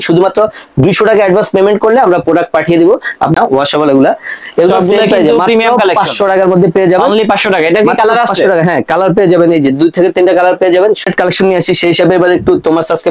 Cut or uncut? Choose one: cut